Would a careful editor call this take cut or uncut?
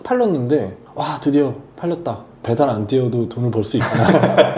uncut